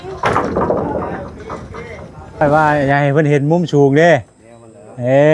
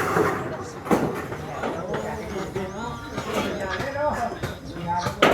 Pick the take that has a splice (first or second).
first